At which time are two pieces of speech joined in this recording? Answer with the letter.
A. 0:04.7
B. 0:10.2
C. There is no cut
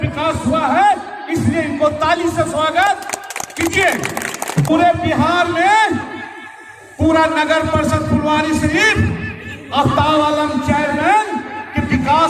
A